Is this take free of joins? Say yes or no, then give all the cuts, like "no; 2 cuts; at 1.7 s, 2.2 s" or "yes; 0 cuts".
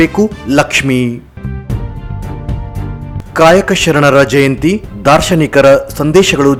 yes; 0 cuts